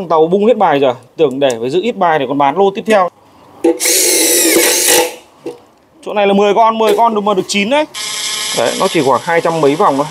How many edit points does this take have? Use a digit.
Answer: 2